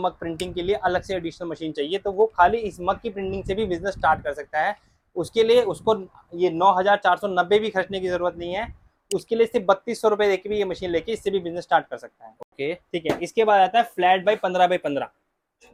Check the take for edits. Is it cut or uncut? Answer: uncut